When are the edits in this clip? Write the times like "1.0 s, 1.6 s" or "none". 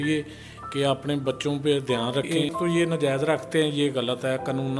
2.3 s